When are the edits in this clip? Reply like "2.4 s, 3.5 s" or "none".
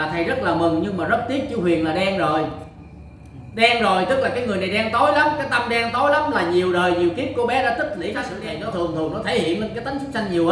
8.4 s